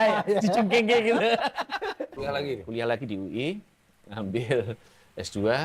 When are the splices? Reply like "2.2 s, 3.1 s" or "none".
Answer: 2.1 s